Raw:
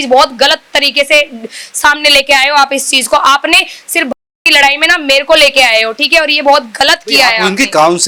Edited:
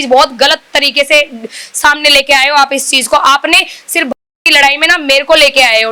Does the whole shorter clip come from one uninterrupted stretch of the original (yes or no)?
yes